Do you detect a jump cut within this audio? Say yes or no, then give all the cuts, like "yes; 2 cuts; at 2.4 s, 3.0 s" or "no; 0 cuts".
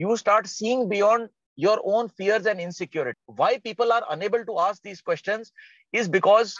yes; 1 cut; at 3.2 s